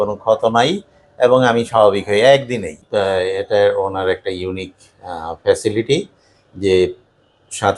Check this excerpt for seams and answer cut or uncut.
cut